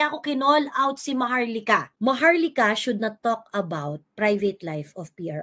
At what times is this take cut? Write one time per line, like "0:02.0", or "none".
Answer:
0:01.9